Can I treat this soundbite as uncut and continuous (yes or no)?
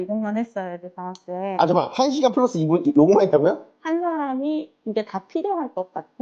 no